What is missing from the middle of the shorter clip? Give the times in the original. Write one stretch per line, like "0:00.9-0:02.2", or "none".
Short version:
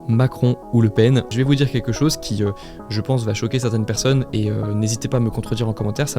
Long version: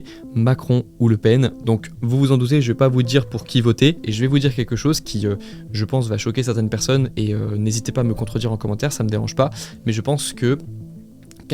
0:01.6-0:04.1